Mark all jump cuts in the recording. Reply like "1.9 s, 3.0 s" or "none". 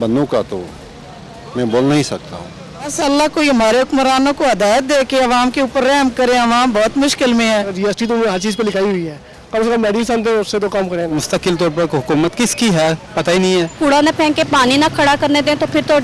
2.9 s, 7.7 s, 11.1 s, 13.7 s